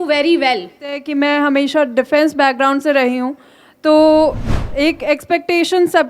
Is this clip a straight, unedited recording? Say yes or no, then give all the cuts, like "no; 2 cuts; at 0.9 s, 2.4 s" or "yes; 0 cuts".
no; 1 cut; at 1.0 s